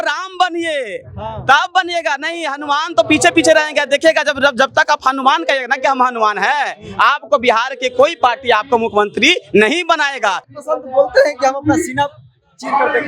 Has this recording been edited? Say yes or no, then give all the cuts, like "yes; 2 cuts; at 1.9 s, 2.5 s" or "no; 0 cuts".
yes; 1 cut; at 10.4 s